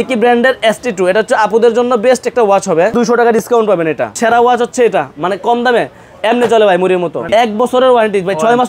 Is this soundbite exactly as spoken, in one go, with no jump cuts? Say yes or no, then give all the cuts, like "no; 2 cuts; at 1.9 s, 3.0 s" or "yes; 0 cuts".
no; 3 cuts; at 2.9 s, 4.1 s, 7.2 s